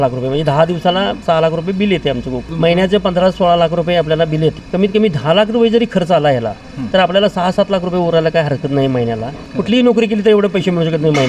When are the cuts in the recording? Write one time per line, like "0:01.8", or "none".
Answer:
0:01.2
0:02.4
0:04.6
0:09.4